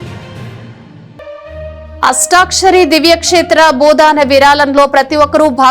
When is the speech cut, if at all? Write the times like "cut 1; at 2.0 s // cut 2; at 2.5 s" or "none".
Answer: cut 1; at 1.0 s